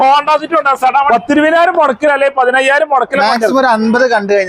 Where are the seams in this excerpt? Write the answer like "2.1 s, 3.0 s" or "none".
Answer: 1.1 s

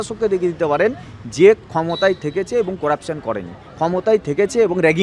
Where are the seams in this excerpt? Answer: none

